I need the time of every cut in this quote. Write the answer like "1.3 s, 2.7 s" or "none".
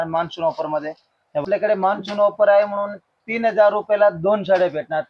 1.4 s